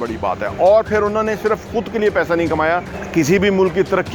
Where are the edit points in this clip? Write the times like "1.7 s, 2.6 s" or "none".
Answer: 3.0 s